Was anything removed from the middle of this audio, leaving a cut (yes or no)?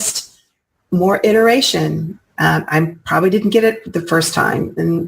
no